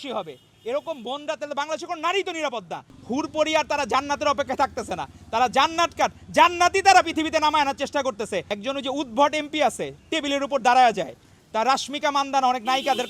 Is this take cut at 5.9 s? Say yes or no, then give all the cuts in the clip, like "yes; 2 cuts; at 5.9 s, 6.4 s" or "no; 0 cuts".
no; 2 cuts; at 2.9 s, 8.5 s